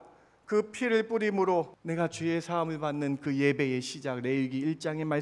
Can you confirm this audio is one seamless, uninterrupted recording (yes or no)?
no